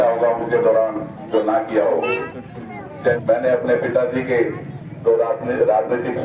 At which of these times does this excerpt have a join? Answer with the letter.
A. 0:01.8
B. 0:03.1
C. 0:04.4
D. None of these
B